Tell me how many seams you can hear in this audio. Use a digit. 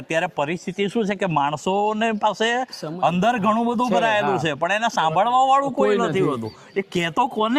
0